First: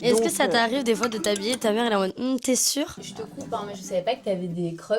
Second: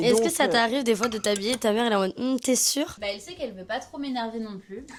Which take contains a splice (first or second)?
first